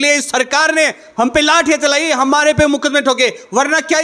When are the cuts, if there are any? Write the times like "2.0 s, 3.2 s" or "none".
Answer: none